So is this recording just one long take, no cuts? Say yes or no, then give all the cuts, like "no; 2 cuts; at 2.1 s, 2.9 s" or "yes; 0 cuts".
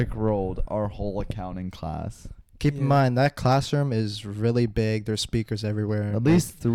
yes; 0 cuts